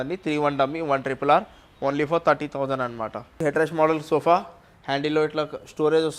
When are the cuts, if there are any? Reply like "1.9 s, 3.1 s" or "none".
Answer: 3.4 s